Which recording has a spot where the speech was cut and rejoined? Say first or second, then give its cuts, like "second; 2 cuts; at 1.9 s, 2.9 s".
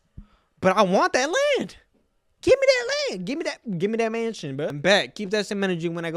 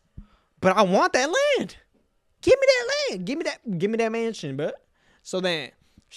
first; 1 cut; at 4.8 s